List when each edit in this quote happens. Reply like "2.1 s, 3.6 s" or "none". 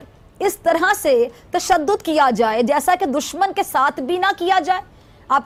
none